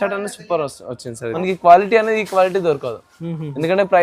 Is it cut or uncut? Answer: cut